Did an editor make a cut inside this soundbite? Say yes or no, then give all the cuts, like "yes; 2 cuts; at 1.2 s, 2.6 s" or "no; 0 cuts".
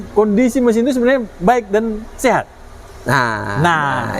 no; 0 cuts